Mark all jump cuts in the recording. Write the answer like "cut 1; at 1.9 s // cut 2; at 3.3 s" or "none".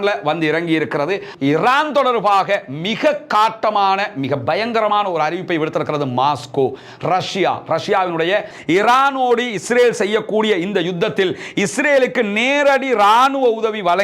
cut 1; at 1.3 s // cut 2; at 8.5 s